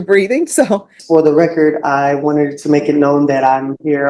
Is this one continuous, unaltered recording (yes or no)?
no